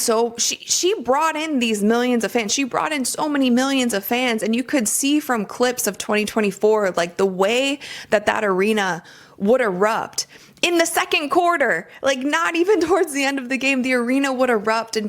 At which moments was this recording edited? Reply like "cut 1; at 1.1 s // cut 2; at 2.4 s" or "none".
cut 1; at 1.7 s